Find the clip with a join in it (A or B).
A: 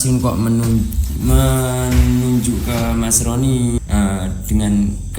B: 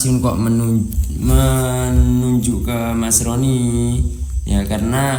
A